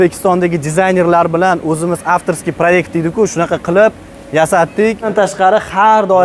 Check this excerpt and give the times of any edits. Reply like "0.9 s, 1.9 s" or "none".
5.1 s